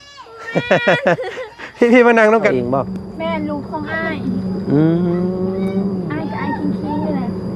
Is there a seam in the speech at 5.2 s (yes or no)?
no